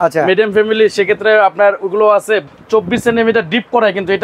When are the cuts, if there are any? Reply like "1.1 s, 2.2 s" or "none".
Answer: 2.4 s